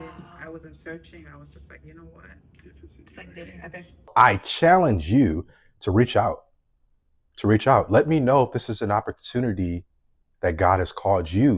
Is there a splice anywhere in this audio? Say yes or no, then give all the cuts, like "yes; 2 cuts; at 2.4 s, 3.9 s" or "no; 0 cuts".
yes; 1 cut; at 4.0 s